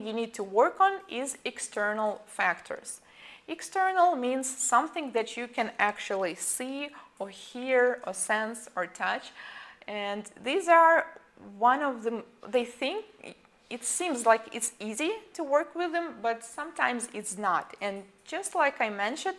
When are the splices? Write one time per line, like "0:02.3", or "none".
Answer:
0:12.4